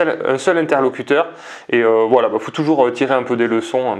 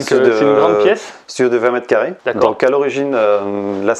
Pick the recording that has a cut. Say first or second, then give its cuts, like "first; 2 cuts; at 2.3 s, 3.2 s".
second; 1 cut; at 2.2 s